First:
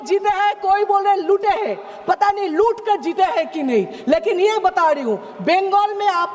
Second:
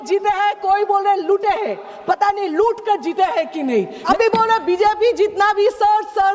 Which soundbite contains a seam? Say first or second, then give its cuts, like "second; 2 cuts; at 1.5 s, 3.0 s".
second; 1 cut; at 4.0 s